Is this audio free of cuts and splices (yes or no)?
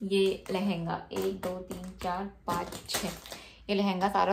yes